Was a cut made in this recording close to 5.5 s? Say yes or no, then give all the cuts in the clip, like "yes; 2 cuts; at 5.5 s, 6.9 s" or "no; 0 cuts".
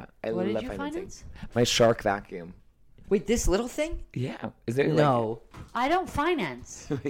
yes; 1 cut; at 5.5 s